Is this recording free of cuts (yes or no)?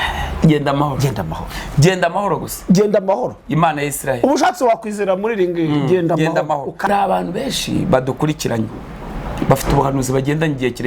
no